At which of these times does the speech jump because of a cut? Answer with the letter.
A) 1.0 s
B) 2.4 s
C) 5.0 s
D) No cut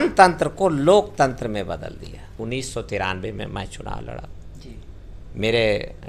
B